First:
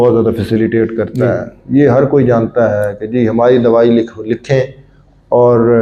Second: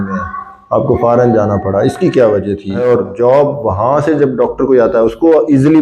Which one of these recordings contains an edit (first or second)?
second